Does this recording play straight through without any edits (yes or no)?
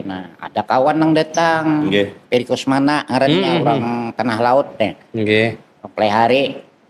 yes